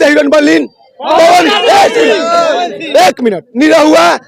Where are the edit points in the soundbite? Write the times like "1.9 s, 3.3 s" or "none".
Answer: none